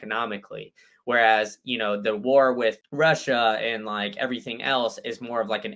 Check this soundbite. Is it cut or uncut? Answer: cut